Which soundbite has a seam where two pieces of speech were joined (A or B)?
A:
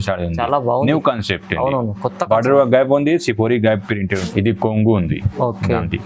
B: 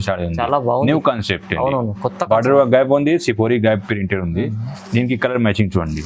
A